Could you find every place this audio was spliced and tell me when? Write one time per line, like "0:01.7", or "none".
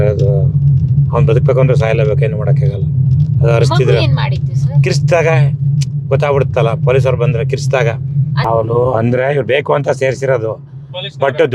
0:08.4